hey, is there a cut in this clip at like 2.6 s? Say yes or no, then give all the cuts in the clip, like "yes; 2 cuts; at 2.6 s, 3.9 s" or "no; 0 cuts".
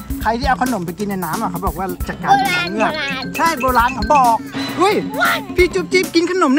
no; 1 cut; at 4.6 s